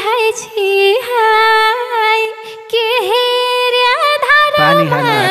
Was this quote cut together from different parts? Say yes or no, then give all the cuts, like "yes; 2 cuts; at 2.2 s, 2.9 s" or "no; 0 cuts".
no; 0 cuts